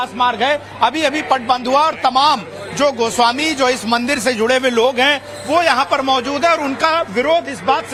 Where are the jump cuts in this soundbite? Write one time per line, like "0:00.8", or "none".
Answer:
none

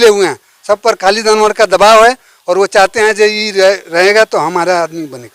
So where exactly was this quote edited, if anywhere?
none

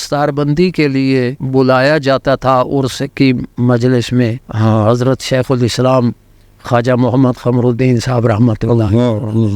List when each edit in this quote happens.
0:01.4
0:04.4

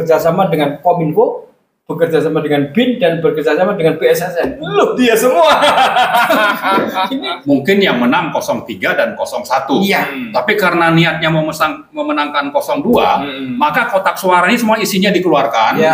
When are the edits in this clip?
0:07.3

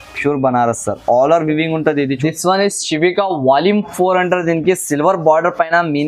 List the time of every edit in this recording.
0:02.1

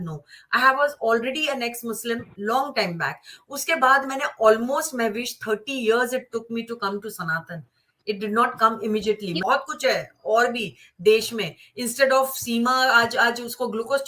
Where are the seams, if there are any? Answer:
0:09.4

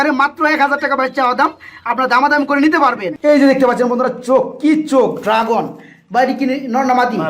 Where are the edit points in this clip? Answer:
0:03.1

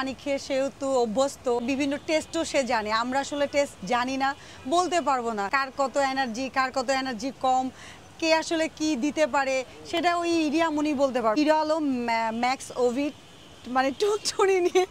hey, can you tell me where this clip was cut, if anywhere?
0:01.6
0:05.5
0:11.4

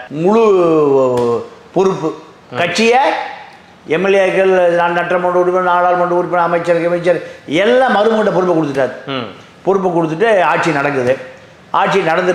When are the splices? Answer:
none

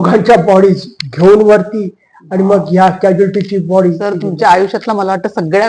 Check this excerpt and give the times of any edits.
0:04.0

